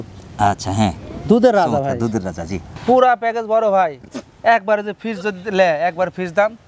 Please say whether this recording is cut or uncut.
cut